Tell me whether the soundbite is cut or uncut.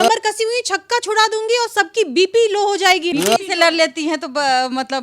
cut